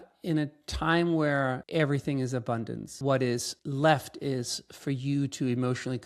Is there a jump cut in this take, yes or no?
yes